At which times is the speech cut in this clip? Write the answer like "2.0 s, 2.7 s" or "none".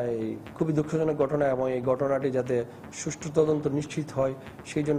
none